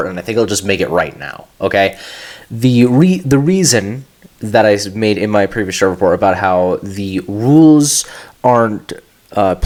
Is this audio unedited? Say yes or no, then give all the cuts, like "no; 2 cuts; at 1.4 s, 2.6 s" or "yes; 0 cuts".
yes; 0 cuts